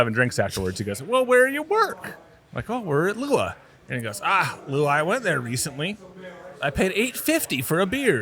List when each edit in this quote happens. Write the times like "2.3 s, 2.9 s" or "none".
none